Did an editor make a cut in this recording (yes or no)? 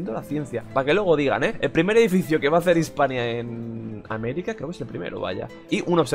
no